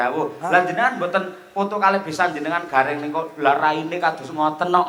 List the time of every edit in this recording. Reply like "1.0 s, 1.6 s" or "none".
none